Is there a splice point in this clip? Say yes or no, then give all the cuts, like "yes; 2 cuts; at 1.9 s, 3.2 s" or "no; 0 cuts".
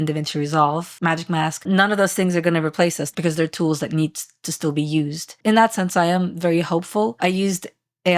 yes; 3 cuts; at 0.9 s, 3.1 s, 7.1 s